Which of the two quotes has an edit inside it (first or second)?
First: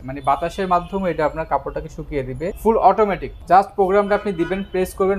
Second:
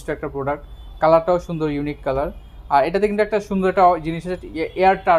first